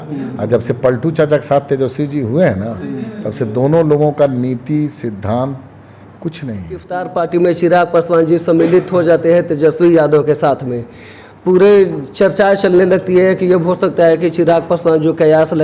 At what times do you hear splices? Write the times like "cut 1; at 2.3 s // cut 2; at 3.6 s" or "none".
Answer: cut 1; at 7.0 s